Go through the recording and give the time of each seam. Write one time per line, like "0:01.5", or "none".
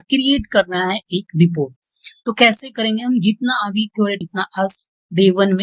0:04.2